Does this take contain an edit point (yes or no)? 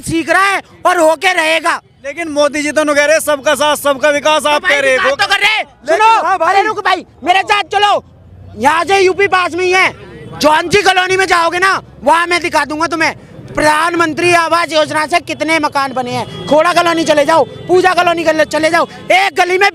no